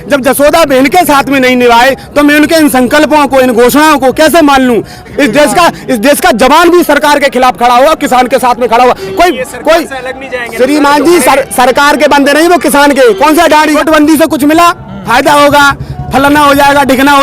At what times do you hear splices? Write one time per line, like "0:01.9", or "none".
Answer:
0:05.1
0:13.8